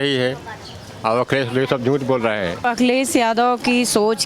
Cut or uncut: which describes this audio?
cut